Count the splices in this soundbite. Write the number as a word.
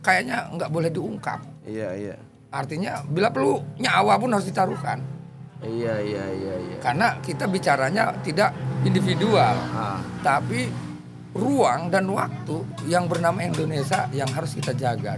zero